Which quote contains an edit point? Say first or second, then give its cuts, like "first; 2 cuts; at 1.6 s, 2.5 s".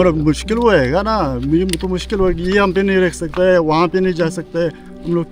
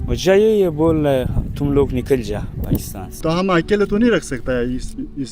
second; 1 cut; at 3.2 s